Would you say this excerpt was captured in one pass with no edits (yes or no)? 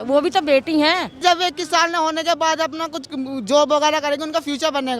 no